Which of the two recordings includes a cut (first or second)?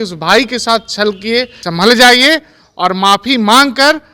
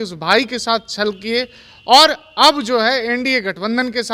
first